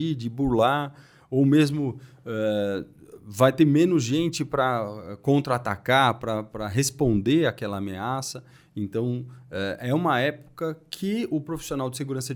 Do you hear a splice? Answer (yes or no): no